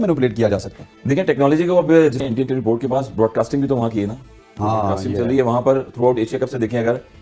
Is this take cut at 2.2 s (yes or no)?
yes